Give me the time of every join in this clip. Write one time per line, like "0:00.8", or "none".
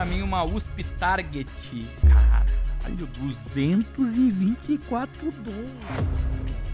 0:05.8